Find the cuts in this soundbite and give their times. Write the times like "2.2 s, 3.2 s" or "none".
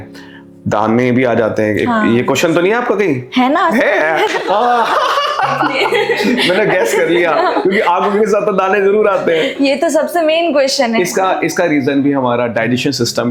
none

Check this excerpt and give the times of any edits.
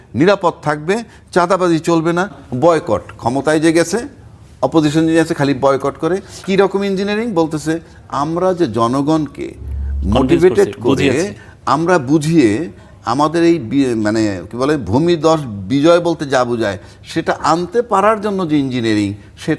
2.4 s, 6.3 s

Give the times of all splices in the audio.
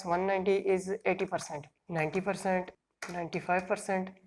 1.8 s, 2.8 s

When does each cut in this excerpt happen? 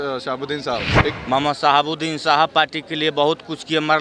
1.2 s

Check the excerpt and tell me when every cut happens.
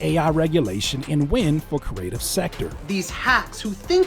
2.8 s

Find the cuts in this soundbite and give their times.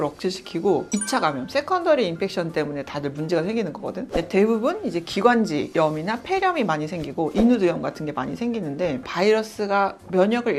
none

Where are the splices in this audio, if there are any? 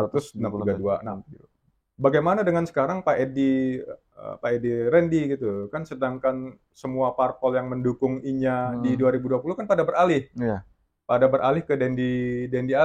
none

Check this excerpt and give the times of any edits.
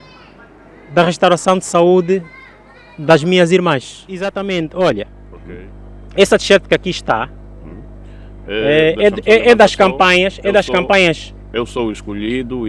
4.0 s

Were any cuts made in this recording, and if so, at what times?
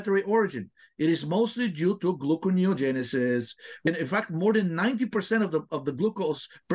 3.8 s

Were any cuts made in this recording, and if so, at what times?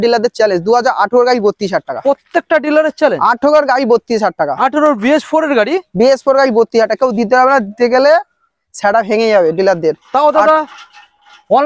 none

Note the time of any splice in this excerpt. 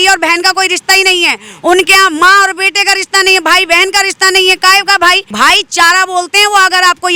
none

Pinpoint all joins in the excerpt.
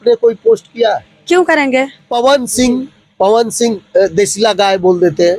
2.1 s

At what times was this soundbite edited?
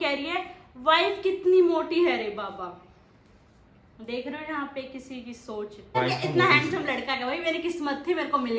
6.0 s

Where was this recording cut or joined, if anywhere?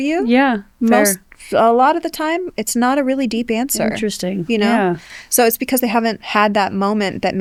none

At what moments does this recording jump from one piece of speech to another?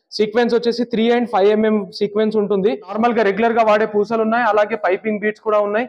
3.0 s

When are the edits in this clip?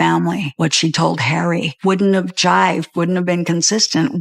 none

